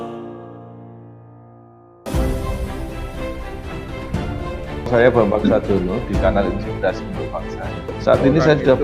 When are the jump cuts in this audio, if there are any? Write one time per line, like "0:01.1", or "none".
0:02.1